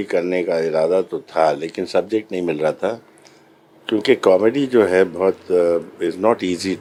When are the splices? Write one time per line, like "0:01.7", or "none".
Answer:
none